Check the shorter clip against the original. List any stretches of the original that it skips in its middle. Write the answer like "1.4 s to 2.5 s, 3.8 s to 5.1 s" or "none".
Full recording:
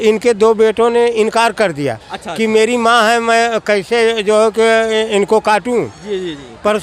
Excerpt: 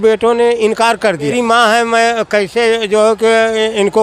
1.9 s to 2.7 s